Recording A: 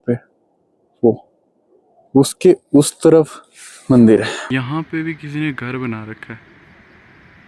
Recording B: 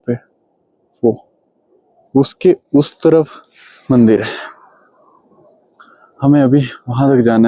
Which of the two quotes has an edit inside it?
A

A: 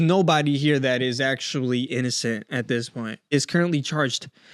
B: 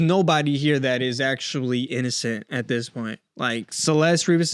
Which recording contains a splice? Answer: A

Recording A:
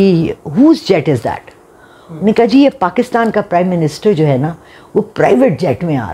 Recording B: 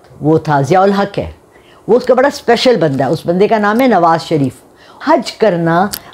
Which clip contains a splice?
B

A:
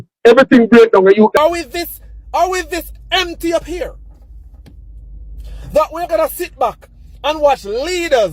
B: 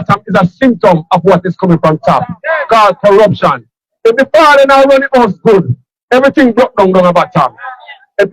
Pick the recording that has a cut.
A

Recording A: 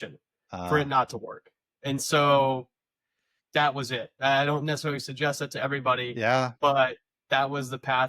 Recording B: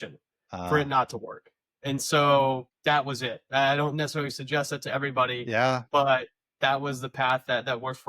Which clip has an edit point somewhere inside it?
B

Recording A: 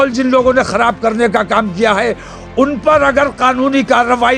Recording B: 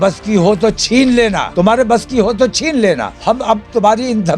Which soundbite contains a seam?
B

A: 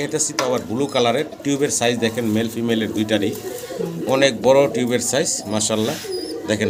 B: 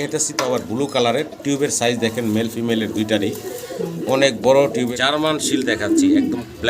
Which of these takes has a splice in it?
B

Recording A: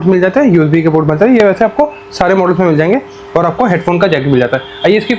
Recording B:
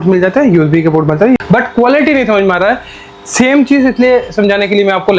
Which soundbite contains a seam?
B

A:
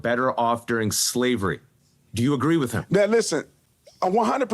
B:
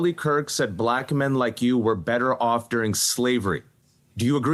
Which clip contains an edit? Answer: A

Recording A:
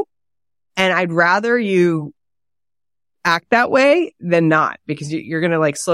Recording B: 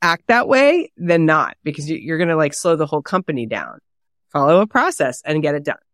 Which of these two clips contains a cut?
B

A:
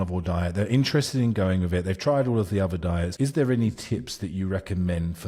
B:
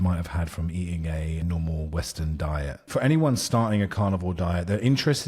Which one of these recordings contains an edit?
B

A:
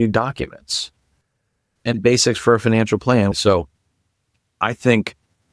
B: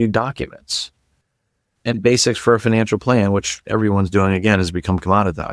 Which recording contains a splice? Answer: A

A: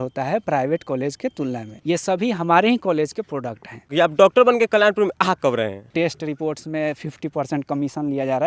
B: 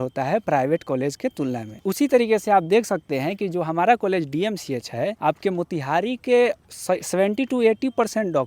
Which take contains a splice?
A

